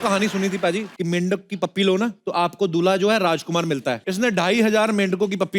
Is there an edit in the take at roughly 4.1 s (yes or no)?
yes